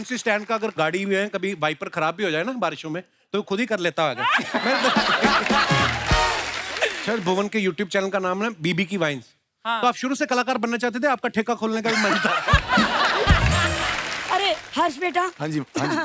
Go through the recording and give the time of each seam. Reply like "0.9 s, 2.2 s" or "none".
7.0 s, 14.1 s